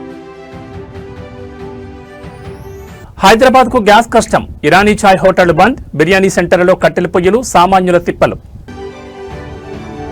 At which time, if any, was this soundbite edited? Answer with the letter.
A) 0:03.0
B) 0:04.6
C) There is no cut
A